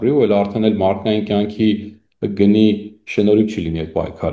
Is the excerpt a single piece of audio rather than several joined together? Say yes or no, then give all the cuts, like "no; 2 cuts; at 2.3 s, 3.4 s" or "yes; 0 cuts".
yes; 0 cuts